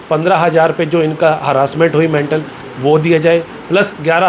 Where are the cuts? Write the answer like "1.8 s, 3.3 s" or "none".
none